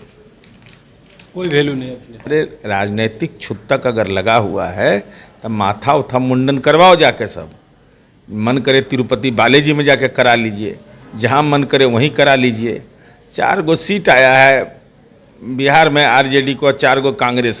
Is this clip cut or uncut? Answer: cut